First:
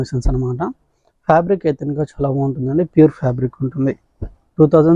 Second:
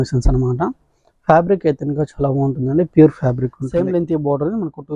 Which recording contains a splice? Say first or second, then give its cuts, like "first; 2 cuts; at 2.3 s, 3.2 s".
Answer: second; 1 cut; at 3.6 s